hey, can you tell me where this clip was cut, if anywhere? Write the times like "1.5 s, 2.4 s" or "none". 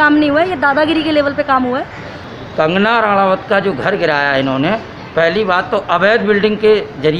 2.3 s